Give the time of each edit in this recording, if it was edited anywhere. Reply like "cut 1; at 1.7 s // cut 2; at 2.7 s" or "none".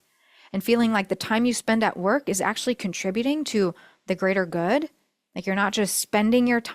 none